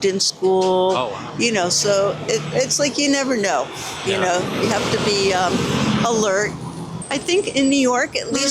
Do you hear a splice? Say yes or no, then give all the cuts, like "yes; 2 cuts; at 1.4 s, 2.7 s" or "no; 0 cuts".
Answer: no; 0 cuts